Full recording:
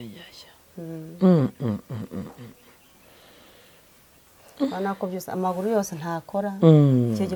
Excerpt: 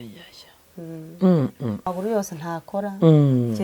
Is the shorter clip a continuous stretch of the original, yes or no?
no